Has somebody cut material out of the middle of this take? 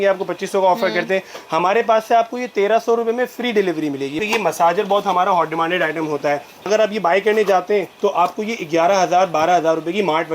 yes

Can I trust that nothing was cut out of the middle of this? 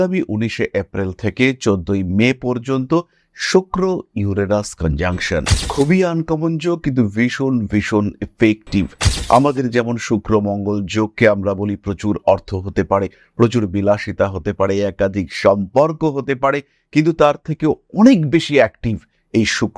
yes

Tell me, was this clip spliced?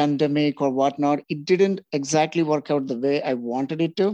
no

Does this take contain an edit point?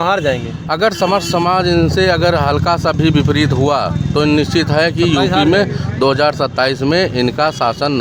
no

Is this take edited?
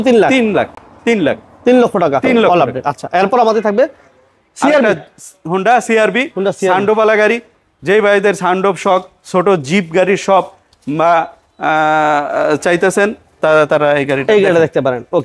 no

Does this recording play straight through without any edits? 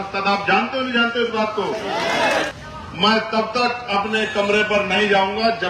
no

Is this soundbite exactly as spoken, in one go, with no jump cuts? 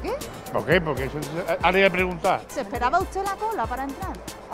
no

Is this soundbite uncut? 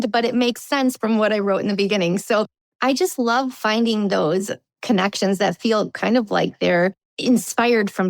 no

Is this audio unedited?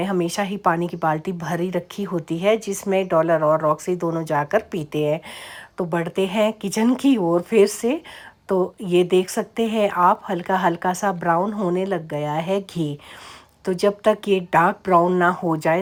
yes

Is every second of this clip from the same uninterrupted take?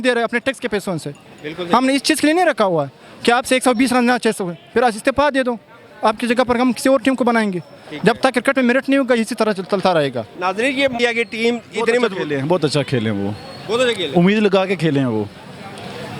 no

